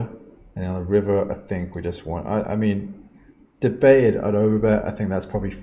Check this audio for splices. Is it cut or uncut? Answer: uncut